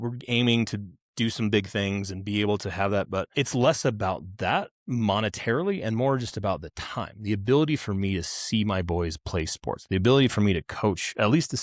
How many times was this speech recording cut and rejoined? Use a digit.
1